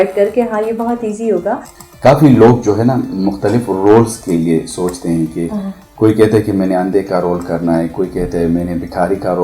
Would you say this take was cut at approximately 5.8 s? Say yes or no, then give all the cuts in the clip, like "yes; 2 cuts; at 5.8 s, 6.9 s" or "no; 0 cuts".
no; 1 cut; at 1.7 s